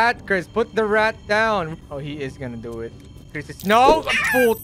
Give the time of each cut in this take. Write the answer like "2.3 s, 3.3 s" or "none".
1.8 s